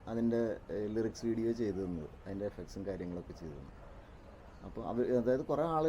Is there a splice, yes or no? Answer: no